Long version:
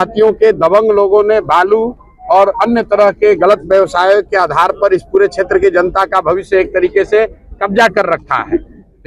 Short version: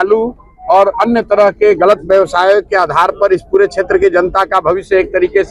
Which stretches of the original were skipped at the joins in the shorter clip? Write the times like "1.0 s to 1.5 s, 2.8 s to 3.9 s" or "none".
none